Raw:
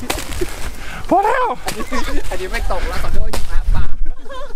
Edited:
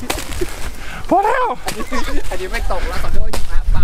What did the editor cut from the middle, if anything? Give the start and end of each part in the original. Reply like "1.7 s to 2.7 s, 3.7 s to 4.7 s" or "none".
none